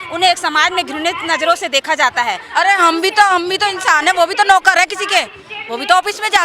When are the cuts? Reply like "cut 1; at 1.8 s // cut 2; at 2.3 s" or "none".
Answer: cut 1; at 2.4 s